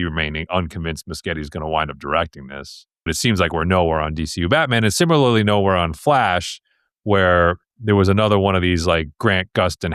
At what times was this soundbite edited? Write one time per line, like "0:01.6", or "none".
0:03.1